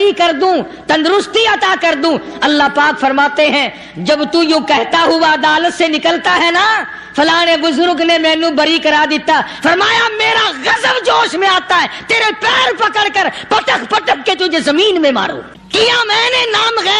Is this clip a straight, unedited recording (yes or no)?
no